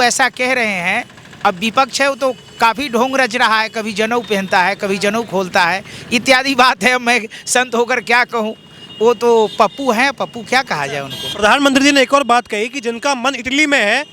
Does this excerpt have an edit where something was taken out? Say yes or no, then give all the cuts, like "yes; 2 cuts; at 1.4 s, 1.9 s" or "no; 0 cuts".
no; 0 cuts